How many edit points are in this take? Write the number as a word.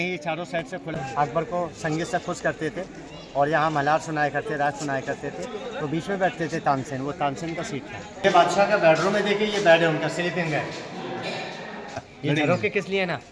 three